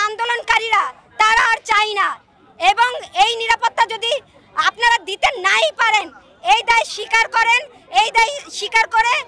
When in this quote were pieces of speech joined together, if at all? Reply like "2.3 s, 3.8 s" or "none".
none